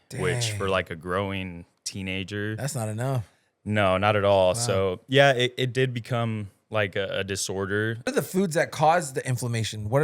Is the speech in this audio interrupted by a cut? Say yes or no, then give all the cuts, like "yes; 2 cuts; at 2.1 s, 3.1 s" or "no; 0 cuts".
yes; 1 cut; at 8.1 s